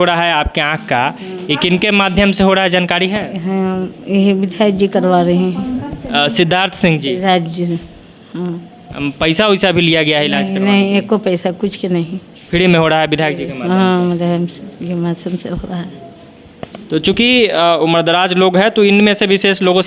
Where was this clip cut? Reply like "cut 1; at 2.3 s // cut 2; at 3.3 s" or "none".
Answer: none